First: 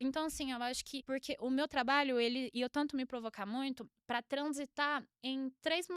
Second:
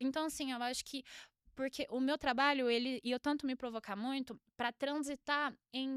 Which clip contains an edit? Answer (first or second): first